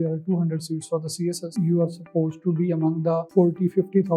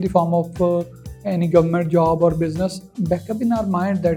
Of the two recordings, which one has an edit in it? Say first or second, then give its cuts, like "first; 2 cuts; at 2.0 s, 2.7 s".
first; 2 cuts; at 1.5 s, 3.3 s